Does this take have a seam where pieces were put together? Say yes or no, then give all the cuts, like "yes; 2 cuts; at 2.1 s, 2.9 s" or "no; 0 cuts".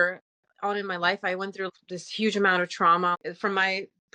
yes; 2 cuts; at 1.7 s, 3.1 s